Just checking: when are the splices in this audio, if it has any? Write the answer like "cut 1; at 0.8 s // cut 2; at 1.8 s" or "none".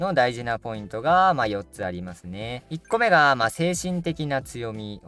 none